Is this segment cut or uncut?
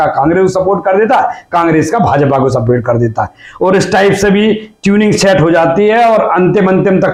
uncut